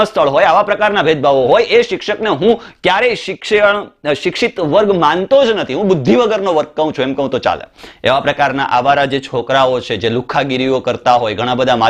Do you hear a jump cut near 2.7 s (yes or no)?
no